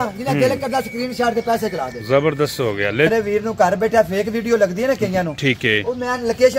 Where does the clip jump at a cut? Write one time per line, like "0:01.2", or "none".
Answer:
0:03.1